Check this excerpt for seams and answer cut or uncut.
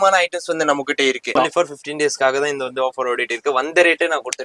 cut